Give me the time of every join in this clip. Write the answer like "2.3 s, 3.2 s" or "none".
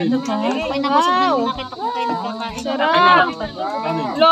none